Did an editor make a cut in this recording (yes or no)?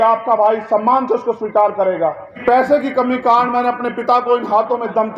yes